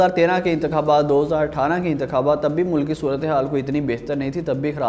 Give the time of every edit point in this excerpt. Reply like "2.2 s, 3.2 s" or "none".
none